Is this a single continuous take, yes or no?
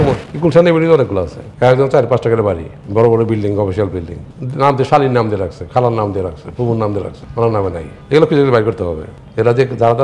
no